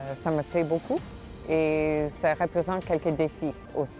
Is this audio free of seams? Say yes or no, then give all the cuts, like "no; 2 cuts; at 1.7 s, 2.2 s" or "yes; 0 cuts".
yes; 0 cuts